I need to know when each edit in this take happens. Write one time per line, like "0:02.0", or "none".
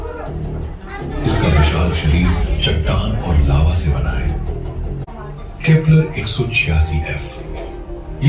0:05.1